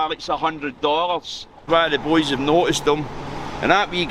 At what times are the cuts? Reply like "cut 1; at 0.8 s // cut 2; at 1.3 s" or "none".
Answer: cut 1; at 1.6 s